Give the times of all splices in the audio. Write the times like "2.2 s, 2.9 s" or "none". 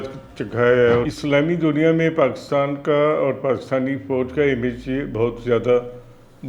1.1 s